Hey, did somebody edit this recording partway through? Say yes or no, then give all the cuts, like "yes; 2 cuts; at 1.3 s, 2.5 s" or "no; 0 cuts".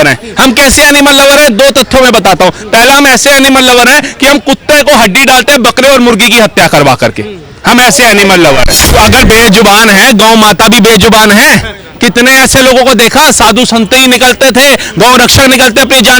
yes; 1 cut; at 8.9 s